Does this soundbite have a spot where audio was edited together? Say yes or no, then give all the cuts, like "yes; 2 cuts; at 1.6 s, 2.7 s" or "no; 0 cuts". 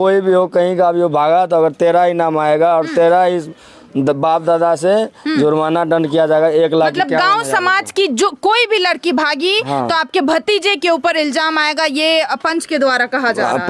no; 0 cuts